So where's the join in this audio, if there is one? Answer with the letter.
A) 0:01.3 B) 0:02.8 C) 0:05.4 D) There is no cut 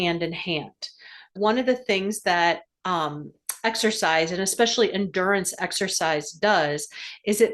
A